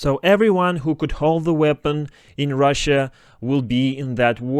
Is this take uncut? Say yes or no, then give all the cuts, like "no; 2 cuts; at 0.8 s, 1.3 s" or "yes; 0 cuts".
yes; 0 cuts